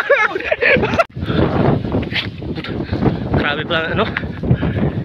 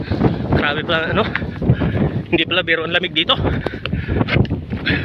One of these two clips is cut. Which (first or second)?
first